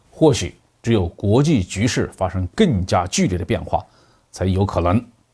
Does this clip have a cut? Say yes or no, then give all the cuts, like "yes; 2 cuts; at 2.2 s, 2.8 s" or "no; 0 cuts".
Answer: no; 0 cuts